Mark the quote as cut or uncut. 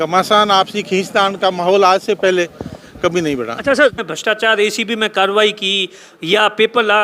cut